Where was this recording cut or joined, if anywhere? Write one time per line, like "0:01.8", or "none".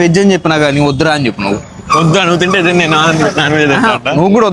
none